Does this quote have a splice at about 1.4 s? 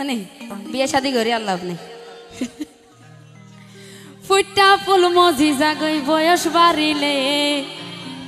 no; 0 cuts

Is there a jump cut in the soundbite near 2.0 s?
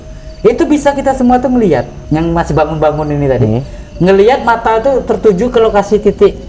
yes; 1 cut; at 2.0 s

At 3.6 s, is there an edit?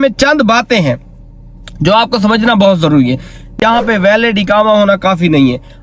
yes; 1 cut; at 3.6 s

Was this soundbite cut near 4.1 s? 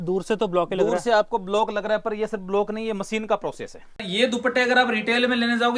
yes; 1 cut; at 4.1 s

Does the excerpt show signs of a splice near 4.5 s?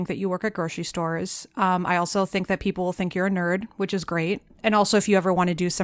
yes; 1 cut; at 4.5 s

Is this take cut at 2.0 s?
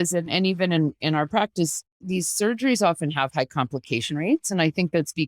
yes; 1 cut; at 2.0 s

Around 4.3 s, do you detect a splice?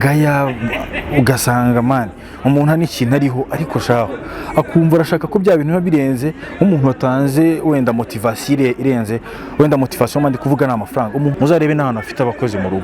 no; 1 cut; at 11.3 s

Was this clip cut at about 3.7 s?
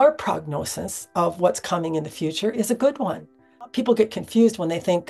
yes; 1 cut; at 3.7 s

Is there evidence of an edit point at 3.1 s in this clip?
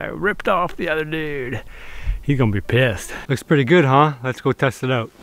yes; 1 cut; at 3.1 s

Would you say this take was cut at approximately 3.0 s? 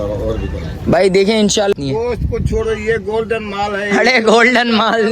no; 1 cut; at 1.7 s

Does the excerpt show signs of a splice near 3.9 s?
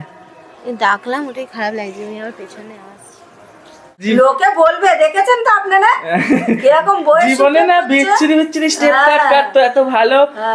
yes; 1 cut; at 3.9 s

